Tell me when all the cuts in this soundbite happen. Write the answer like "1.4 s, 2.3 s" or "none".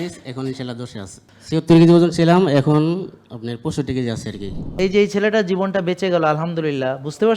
1.2 s, 4.8 s